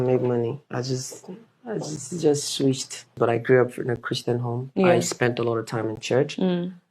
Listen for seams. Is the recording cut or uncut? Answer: cut